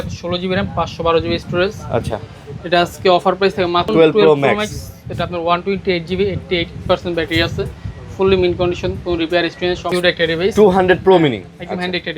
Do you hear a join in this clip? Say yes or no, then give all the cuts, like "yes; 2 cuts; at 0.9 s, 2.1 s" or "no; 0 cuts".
yes; 2 cuts; at 3.9 s, 9.9 s